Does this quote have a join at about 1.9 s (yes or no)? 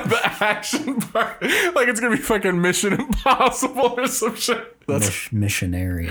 no